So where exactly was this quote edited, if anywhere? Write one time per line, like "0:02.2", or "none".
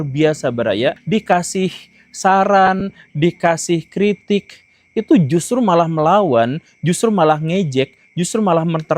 0:01.0